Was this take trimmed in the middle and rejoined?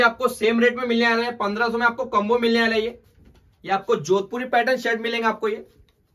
no; 0 cuts

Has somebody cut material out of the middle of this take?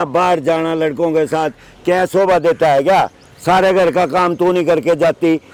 no; 0 cuts

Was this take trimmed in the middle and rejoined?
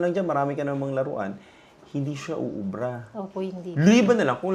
no; 0 cuts

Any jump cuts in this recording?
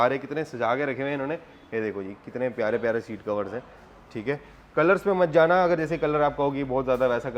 no; 0 cuts

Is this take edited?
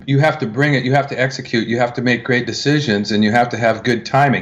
no; 0 cuts

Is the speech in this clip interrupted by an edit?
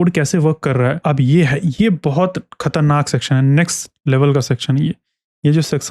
yes; 1 cut; at 1.0 s

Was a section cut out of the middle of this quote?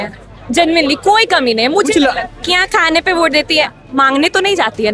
yes; 1 cut; at 2.4 s

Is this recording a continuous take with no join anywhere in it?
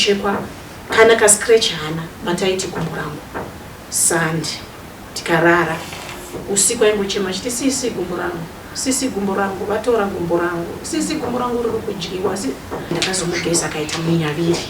no; 1 cut; at 12.9 s

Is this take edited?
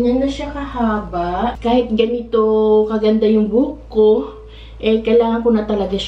yes; 1 cut; at 1.6 s

